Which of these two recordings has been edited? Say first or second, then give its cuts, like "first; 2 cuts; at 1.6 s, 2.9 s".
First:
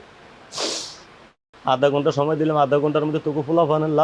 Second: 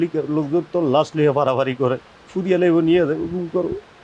first; 1 cut; at 1.2 s